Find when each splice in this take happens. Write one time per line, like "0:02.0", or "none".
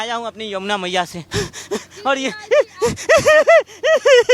0:01.2